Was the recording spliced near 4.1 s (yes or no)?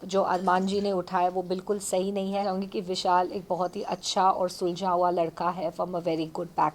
no